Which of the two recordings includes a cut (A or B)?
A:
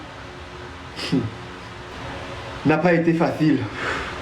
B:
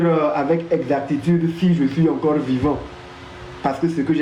A